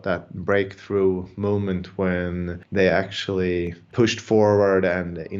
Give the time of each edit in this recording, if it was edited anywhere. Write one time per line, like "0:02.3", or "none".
0:02.6
0:03.8